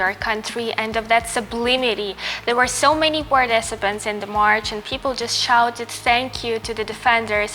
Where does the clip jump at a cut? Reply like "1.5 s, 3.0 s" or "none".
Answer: none